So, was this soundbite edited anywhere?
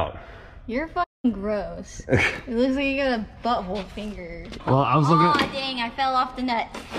yes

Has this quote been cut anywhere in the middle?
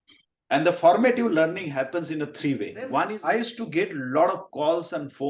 yes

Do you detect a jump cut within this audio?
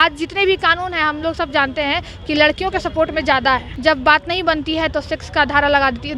yes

